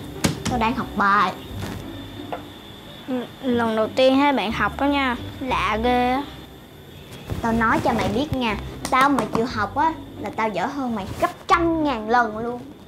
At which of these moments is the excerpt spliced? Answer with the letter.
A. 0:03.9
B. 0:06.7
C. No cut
C